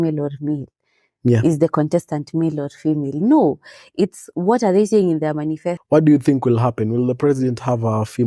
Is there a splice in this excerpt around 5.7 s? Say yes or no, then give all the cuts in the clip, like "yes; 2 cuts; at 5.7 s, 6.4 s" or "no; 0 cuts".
yes; 1 cut; at 5.7 s